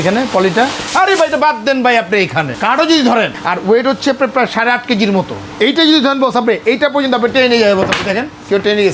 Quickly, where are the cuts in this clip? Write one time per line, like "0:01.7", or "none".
0:00.8
0:02.5
0:03.4
0:05.4